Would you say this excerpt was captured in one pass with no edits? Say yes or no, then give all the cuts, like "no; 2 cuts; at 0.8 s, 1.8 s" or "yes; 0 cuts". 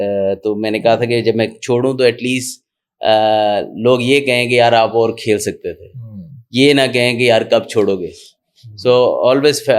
yes; 0 cuts